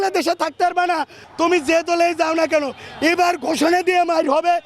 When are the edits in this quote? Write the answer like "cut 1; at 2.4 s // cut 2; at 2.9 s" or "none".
cut 1; at 1.2 s